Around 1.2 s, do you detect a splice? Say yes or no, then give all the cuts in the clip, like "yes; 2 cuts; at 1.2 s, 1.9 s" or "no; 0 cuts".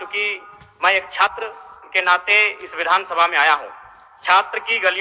yes; 1 cut; at 1.2 s